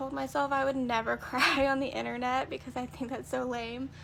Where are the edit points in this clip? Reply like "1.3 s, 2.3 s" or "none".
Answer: none

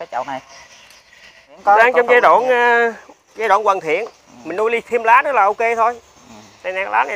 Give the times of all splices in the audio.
1.6 s

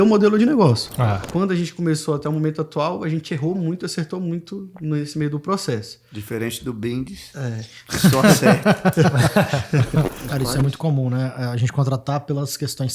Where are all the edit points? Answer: 1.2 s, 10.2 s

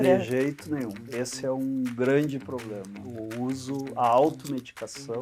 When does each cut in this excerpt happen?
3.0 s

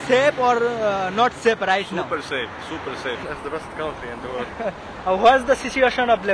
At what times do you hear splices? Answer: 3.2 s

